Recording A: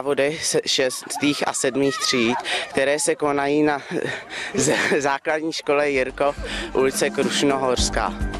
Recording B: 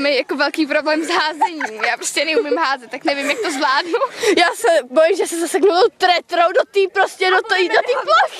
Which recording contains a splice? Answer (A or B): B